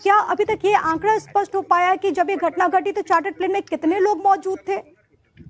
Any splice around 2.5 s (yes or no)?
yes